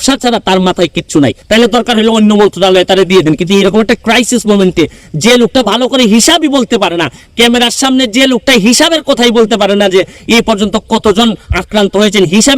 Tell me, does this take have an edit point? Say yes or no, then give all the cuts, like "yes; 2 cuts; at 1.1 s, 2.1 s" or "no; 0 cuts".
yes; 1 cut; at 1.4 s